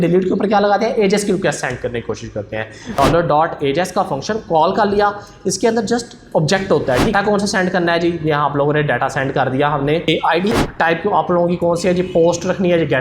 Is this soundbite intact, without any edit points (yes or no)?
no